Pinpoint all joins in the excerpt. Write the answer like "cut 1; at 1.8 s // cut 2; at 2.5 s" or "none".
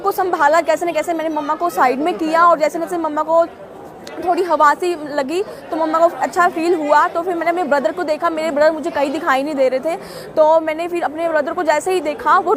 none